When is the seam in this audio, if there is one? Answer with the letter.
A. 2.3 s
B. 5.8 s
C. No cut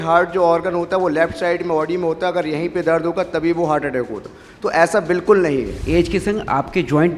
B